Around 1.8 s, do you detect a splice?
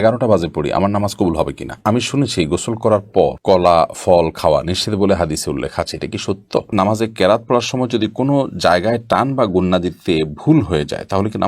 yes; 2 cuts; at 1.8 s, 6.7 s

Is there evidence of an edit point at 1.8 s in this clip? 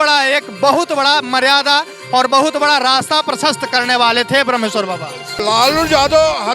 no; 1 cut; at 5.4 s

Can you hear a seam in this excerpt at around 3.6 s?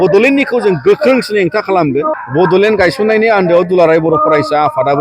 no; 1 cut; at 2.2 s

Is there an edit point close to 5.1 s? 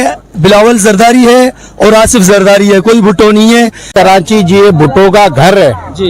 no; 1 cut; at 3.9 s

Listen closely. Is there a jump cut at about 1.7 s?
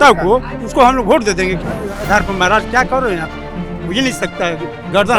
yes; 1 cut; at 1.7 s

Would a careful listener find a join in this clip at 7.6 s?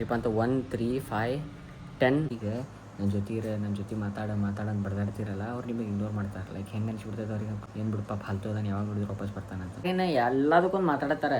yes; 3 cuts; at 2.3 s, 7.6 s, 9.9 s

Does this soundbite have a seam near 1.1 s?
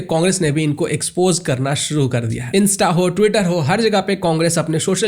no; 1 cut; at 2.4 s

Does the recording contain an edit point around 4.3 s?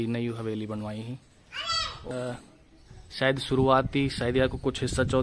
no; 1 cut; at 2.0 s

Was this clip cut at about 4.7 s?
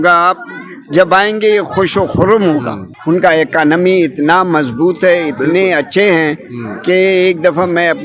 no; 1 cut; at 2.8 s

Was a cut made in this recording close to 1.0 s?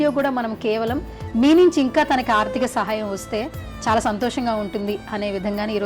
no; 0 cuts

